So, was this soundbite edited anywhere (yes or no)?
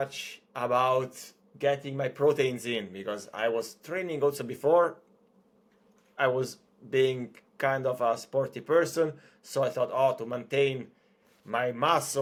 no